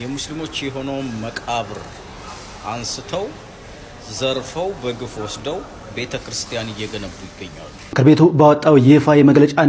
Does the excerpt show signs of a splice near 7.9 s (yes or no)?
yes